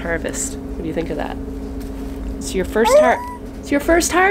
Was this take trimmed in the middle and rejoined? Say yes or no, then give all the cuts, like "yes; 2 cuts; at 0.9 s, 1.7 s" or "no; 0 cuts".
no; 0 cuts